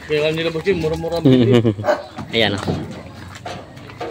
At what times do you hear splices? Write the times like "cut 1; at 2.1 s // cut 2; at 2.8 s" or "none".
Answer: cut 1; at 2.1 s